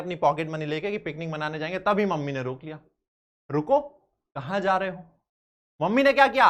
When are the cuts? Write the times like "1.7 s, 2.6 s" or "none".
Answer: none